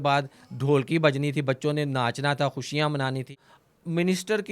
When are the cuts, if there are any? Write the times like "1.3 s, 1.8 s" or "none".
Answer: 3.5 s